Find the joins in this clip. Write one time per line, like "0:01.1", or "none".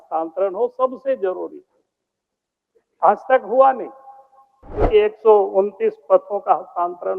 0:04.9

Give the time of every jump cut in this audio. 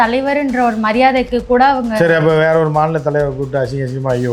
none

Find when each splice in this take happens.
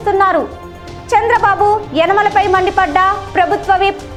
none

